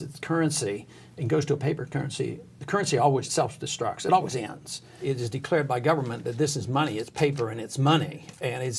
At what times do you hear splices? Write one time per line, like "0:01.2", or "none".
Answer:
0:03.3
0:05.0